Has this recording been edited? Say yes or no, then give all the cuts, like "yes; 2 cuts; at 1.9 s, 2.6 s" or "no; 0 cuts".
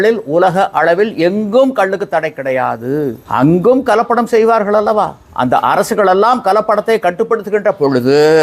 yes; 2 cuts; at 3.2 s, 5.2 s